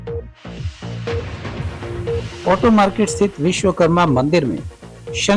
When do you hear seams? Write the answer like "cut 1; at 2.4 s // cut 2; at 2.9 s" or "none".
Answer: cut 1; at 2.4 s